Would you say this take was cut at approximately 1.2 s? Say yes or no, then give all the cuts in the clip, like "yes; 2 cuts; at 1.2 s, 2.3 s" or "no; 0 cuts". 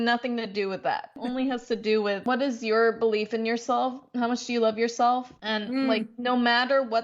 yes; 3 cuts; at 1.2 s, 2.2 s, 5.3 s